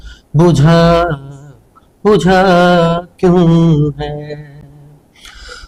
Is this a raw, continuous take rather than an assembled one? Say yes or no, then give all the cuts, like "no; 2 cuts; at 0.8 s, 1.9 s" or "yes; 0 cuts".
yes; 0 cuts